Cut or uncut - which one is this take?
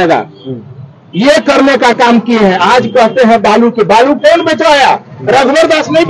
uncut